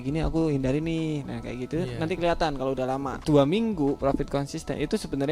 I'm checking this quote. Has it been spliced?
yes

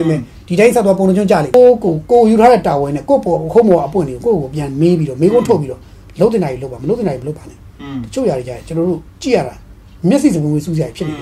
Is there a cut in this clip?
yes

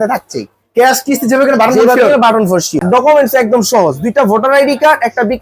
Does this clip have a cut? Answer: yes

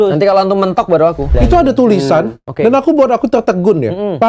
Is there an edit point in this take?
yes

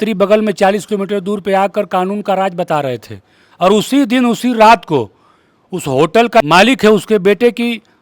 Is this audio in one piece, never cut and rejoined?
no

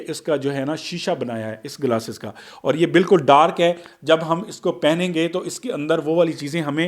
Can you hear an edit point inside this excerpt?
no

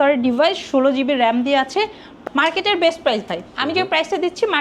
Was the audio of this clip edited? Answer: yes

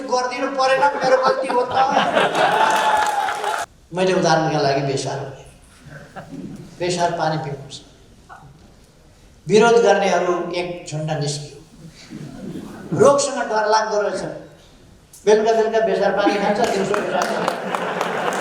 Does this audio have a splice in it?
yes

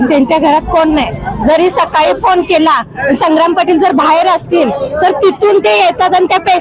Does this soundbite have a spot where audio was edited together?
no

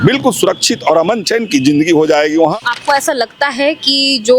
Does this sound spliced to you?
yes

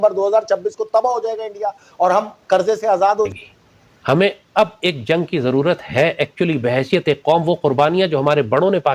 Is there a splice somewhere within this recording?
yes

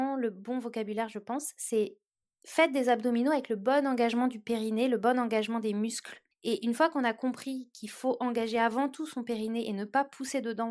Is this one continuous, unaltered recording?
yes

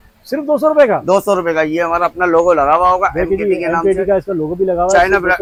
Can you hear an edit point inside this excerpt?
no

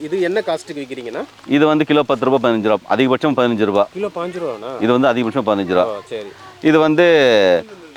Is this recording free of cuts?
yes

